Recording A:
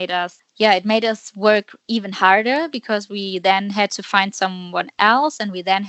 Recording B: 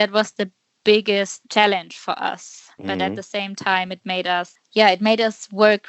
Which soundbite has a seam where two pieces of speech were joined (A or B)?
B